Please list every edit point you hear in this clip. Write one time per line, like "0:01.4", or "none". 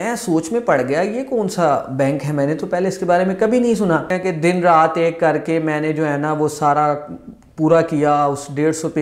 0:04.1